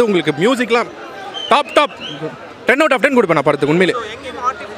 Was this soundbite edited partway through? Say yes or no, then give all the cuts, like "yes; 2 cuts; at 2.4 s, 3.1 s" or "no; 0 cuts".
no; 0 cuts